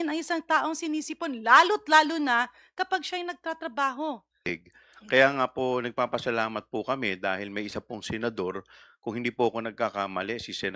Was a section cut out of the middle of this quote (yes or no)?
yes